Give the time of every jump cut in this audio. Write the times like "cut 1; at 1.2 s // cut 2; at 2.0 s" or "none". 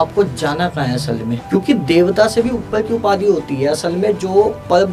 cut 1; at 1.4 s